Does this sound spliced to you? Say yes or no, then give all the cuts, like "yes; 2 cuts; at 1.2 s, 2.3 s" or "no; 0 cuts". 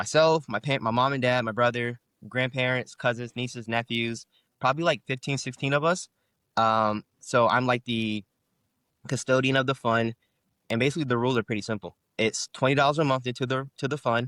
no; 0 cuts